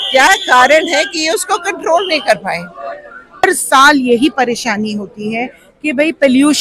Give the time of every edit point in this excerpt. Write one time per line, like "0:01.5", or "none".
0:03.4